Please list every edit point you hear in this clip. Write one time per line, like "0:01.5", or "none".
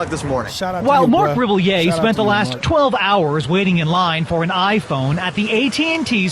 none